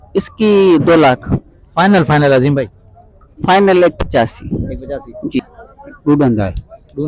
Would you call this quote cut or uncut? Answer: cut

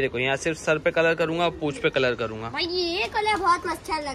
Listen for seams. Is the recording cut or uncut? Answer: uncut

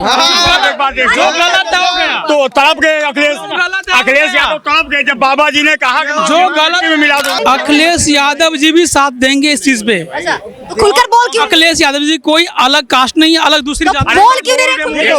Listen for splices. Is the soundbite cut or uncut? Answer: cut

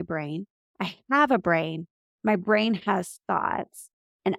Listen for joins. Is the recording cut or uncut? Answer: uncut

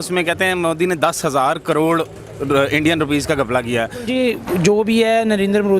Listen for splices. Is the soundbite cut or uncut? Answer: cut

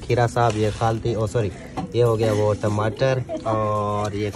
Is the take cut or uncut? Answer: uncut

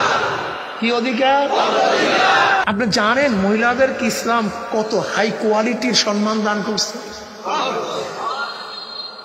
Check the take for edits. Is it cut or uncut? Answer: cut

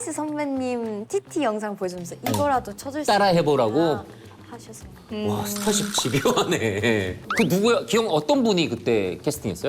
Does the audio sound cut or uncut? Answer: cut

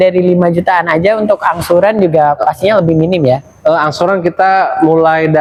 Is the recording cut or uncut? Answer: uncut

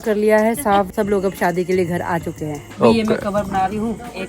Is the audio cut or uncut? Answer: cut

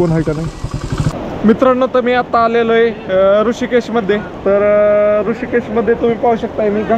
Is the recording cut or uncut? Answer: cut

